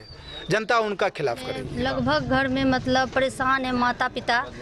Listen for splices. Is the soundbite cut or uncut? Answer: cut